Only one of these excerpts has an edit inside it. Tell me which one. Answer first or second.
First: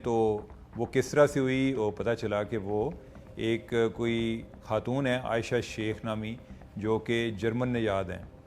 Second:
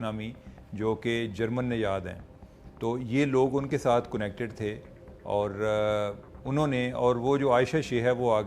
first